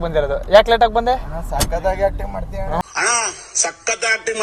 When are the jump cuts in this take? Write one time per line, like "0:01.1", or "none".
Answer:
none